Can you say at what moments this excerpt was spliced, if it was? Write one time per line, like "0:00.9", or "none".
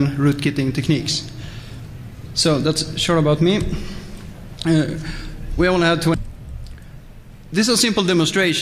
none